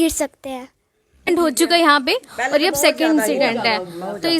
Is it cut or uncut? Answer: cut